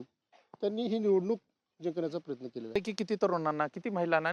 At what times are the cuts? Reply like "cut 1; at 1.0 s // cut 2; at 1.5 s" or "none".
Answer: cut 1; at 2.8 s